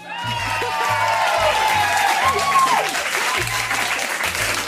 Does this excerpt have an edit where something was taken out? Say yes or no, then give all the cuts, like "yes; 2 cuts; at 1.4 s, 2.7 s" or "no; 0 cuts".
no; 0 cuts